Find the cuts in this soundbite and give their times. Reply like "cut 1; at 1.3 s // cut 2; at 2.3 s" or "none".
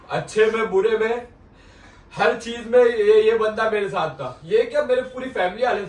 none